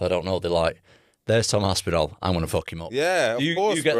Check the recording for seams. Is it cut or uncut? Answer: uncut